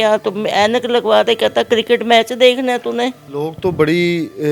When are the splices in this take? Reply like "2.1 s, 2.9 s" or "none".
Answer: 3.2 s